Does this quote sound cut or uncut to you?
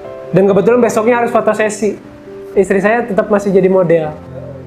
cut